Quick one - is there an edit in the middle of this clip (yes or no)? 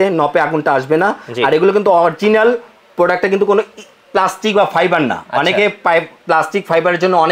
no